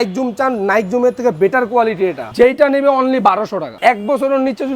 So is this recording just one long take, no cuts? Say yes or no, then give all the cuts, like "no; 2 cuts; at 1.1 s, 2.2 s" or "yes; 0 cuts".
no; 2 cuts; at 2.2 s, 3.7 s